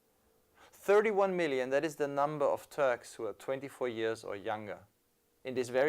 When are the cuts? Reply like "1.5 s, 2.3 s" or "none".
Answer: 1.7 s